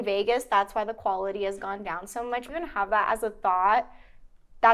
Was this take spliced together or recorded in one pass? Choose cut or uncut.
cut